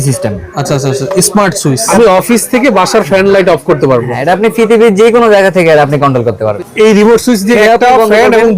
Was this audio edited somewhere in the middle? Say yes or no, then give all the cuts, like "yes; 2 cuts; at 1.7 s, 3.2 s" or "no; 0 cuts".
yes; 3 cuts; at 1.9 s, 6.5 s, 7.6 s